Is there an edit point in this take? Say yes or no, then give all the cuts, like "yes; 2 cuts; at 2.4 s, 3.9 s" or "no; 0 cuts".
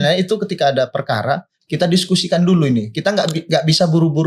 no; 0 cuts